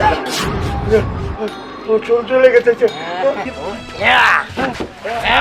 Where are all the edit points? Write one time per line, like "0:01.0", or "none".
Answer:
0:03.5